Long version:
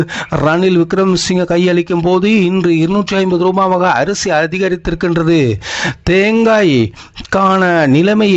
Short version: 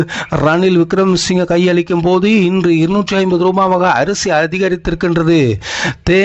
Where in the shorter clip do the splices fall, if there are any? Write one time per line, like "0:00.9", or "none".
none